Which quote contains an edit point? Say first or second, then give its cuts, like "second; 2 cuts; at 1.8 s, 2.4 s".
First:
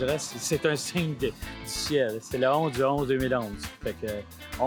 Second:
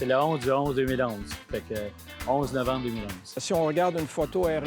second; 1 cut; at 3.4 s